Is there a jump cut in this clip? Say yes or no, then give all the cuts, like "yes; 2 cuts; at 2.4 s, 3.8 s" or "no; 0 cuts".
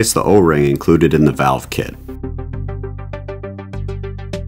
yes; 1 cut; at 2.0 s